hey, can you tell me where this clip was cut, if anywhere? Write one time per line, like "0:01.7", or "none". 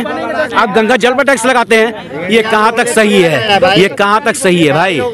none